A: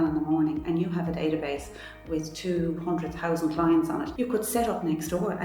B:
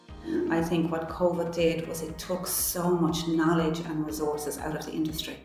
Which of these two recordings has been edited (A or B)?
A